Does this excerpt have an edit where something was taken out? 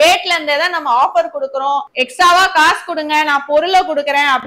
no; 0 cuts

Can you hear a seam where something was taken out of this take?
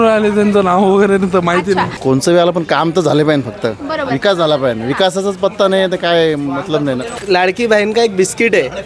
yes; 2 cuts; at 1.9 s, 7.2 s

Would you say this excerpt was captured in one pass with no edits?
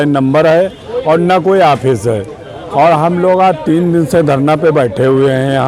yes; 0 cuts

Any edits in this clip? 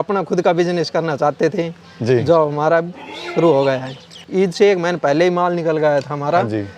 yes; 1 cut; at 4.2 s

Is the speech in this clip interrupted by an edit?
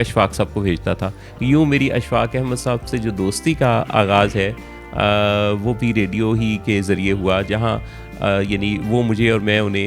no; 0 cuts

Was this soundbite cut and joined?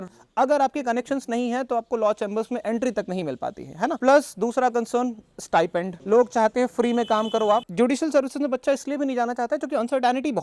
yes; 3 cuts; at 4.0 s, 5.9 s, 7.7 s

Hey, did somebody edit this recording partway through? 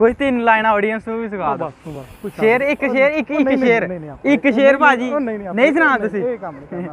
no; 0 cuts

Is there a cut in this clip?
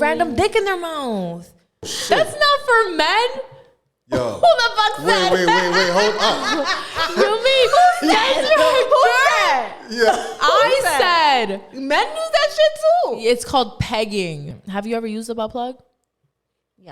yes; 2 cuts; at 1.9 s, 14.5 s

